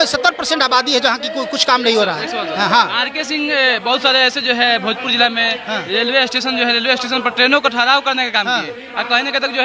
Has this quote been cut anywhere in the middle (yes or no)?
no